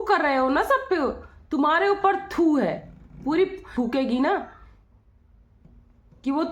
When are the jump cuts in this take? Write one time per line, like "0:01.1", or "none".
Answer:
0:03.7